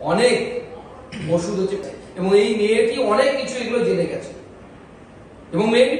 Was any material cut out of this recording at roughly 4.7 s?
no; 1 cut; at 1.8 s

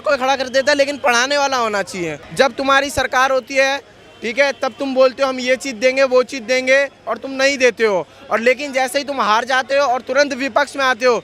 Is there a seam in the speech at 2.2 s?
yes; 1 cut; at 2.2 s

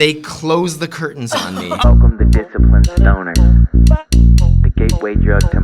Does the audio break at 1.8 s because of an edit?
yes; 1 cut; at 1.8 s

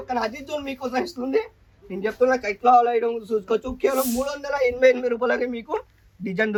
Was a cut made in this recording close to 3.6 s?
no; 0 cuts

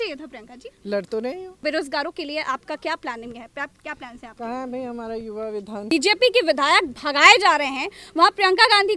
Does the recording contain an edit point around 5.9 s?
yes; 2 cuts; at 1.6 s, 5.9 s

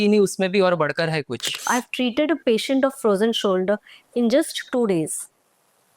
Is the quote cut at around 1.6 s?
yes; 1 cut; at 1.6 s

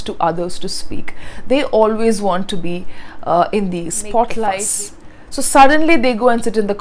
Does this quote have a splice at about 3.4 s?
no; 1 cut; at 4.7 s

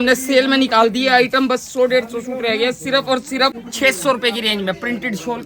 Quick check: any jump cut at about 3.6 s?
yes; 1 cut; at 3.6 s

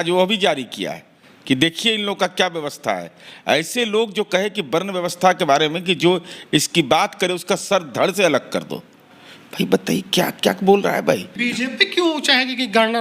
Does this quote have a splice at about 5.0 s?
no; 1 cut; at 11.4 s

